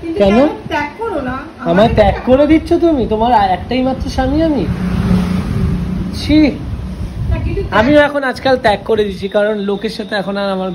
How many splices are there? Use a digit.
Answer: 0